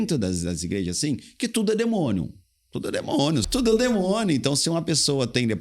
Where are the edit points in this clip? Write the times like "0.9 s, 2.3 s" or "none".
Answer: 3.4 s

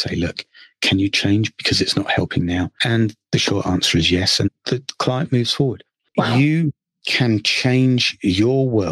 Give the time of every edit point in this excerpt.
2.8 s, 4.5 s, 5.9 s

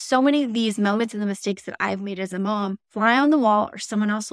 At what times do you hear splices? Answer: 2.8 s

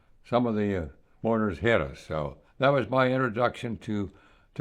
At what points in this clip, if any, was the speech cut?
1.0 s, 2.4 s

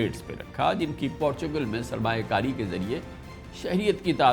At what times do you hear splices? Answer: none

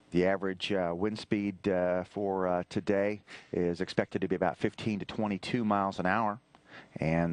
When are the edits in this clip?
none

